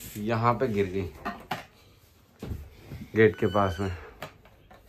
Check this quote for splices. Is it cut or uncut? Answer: uncut